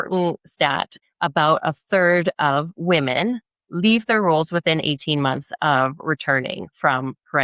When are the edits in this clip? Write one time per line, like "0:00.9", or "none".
0:01.0